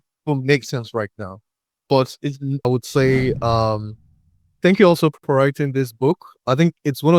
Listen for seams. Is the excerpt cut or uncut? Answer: cut